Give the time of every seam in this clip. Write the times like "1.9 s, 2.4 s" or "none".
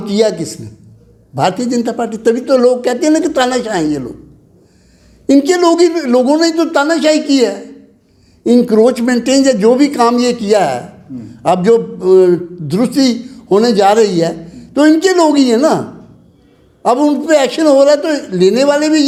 none